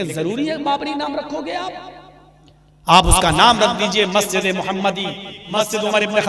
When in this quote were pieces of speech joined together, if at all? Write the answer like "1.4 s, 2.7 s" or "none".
5.4 s